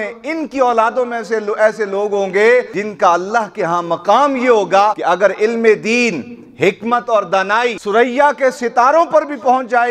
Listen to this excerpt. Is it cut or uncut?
cut